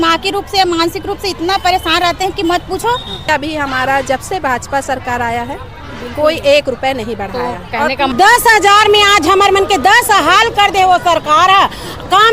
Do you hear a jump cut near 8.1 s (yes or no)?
yes